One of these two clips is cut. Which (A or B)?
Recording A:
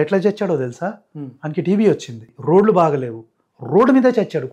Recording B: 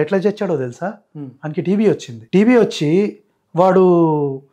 A